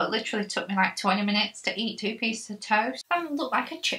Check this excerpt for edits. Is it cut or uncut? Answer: cut